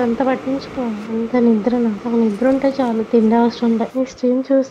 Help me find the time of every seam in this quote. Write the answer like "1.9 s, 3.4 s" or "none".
1.0 s, 2.0 s, 3.9 s